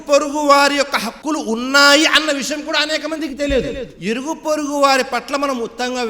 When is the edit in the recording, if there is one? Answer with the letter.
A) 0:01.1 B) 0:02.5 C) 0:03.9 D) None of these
C